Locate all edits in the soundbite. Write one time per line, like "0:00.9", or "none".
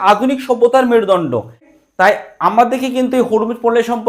0:01.7